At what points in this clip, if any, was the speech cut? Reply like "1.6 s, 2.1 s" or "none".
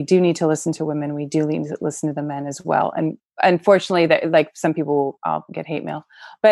none